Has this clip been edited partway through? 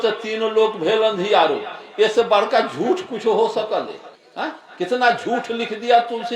no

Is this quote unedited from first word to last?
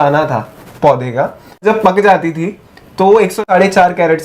no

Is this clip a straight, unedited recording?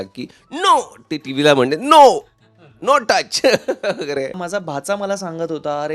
no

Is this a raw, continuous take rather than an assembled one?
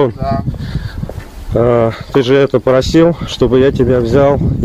yes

